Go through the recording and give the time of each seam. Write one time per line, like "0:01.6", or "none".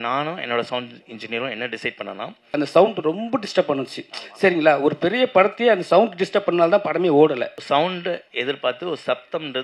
0:02.5
0:07.5